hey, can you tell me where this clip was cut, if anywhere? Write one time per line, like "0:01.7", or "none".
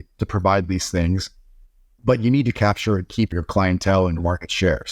0:02.6
0:04.2